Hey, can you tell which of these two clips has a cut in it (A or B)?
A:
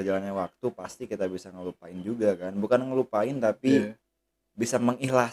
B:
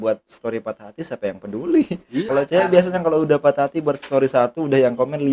B